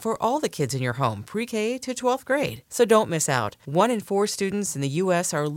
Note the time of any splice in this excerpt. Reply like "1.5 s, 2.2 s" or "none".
none

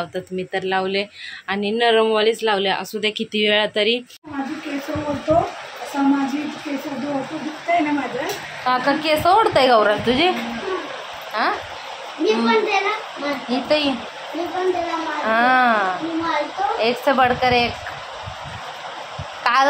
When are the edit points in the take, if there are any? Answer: 4.2 s

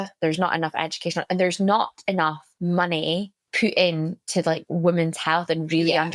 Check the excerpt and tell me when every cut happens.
2.5 s, 3.4 s

